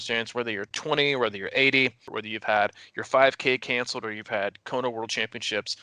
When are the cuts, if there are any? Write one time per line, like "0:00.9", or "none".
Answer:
0:02.1

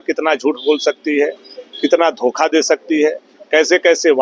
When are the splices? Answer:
none

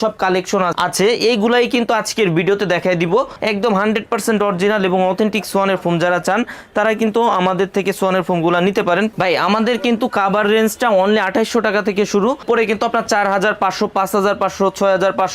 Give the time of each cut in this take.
0:03.3
0:09.1
0:12.4

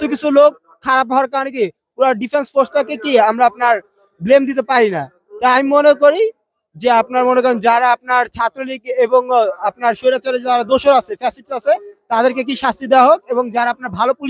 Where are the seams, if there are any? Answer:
none

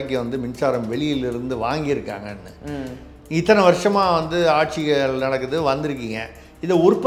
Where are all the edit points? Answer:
none

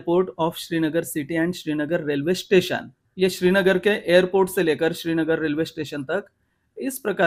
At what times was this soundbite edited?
none

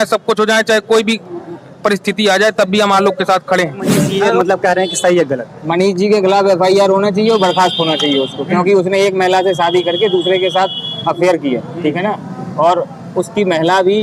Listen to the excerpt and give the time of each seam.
0:04.0

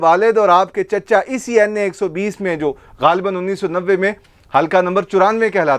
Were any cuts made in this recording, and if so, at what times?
none

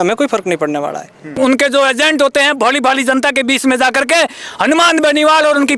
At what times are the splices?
0:01.3

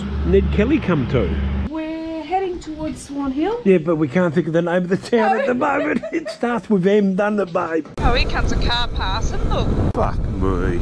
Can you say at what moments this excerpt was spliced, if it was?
0:01.6
0:07.9
0:09.9

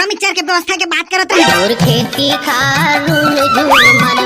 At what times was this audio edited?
0:01.4

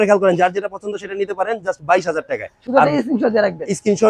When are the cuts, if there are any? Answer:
none

